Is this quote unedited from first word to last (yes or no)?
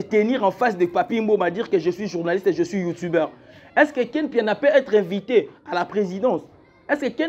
yes